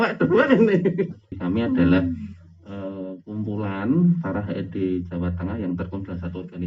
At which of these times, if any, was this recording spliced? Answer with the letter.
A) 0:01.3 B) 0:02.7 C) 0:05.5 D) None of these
A